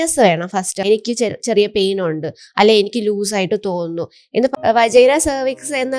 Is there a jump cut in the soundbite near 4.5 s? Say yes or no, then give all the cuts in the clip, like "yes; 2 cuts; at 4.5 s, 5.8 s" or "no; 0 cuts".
yes; 2 cuts; at 0.8 s, 4.5 s